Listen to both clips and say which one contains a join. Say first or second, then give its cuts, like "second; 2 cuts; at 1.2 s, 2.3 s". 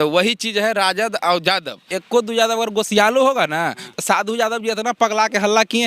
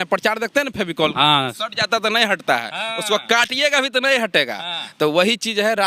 first; 1 cut; at 2.0 s